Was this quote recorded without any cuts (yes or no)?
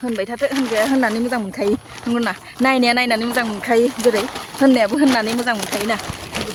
yes